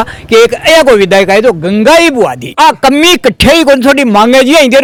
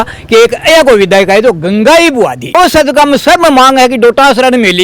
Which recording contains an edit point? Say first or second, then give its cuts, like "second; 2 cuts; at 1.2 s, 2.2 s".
second; 1 cut; at 2.6 s